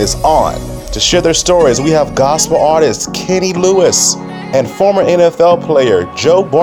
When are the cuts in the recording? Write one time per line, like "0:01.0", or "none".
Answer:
none